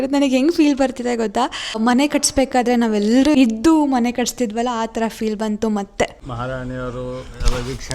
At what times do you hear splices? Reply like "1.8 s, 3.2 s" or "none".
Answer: 1.8 s, 3.3 s, 6.2 s